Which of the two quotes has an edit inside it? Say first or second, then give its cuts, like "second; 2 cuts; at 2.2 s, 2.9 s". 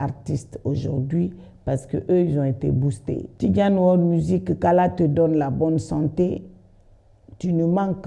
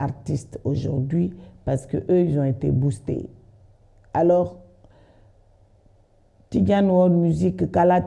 first; 1 cut; at 3.3 s